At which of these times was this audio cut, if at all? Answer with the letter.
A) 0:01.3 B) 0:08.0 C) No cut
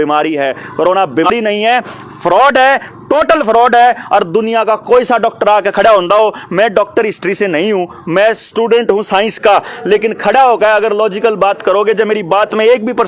A